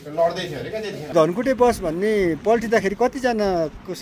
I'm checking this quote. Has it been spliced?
yes; 1 cut; at 1.1 s

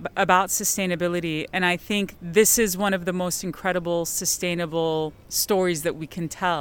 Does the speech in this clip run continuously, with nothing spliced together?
no; 1 cut; at 5.3 s

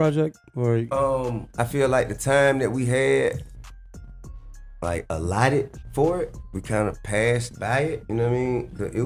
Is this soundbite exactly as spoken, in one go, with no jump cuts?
yes; 0 cuts

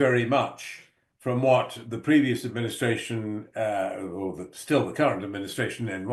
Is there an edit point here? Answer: no; 0 cuts

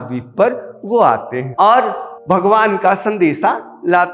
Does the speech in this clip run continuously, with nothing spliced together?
no; 2 cuts; at 1.4 s, 2.1 s

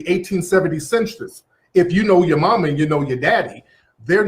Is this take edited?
no; 0 cuts

